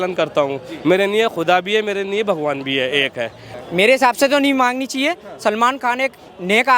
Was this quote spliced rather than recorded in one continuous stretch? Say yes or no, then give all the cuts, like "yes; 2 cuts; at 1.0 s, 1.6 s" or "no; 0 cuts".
yes; 1 cut; at 3.5 s